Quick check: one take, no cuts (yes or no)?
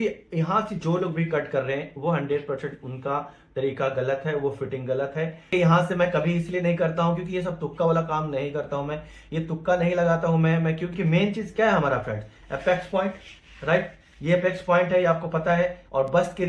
no